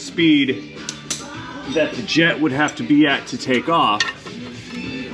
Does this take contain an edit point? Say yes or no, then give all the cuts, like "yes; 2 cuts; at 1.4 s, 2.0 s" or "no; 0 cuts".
no; 0 cuts